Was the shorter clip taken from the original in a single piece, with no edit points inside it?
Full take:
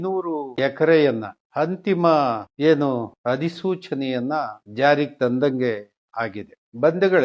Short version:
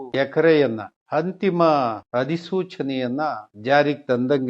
no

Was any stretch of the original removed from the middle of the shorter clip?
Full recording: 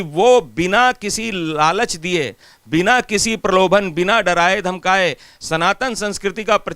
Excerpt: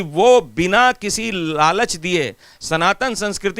yes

